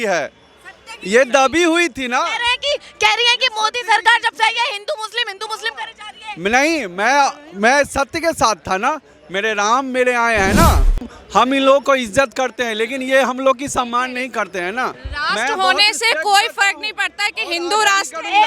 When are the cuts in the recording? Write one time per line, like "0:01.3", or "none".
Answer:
0:11.1